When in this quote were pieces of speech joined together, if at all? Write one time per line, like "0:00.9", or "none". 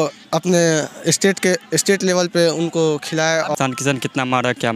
0:03.5